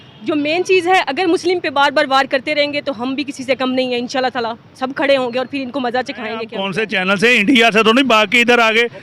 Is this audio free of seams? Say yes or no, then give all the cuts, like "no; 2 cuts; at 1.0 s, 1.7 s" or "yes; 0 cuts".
no; 1 cut; at 6.6 s